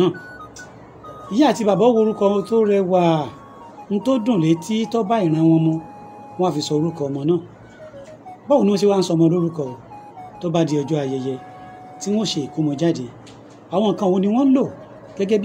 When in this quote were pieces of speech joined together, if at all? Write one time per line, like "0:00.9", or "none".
none